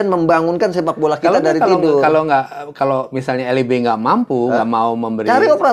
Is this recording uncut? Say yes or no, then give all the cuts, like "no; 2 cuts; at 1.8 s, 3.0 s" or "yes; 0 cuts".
yes; 0 cuts